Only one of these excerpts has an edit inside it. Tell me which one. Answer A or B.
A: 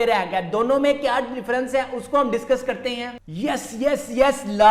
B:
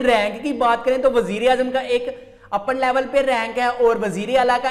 A